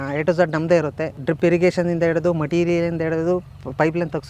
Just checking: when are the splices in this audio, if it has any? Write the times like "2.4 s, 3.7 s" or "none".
1.1 s

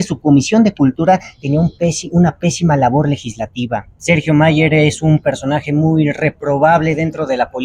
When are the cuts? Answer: 3.9 s

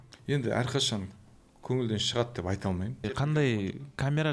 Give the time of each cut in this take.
2.9 s

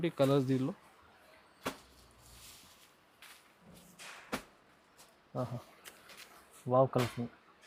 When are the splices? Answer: none

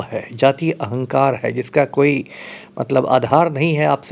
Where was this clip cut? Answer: none

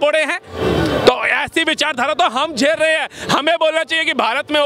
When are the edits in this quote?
none

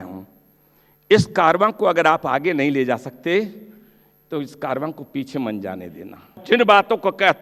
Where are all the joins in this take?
6.4 s

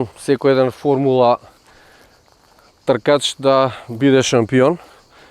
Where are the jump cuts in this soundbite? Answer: none

